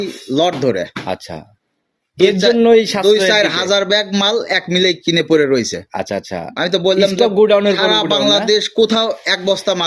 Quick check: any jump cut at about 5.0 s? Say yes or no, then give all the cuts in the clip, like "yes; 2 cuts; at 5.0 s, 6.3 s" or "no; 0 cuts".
no; 0 cuts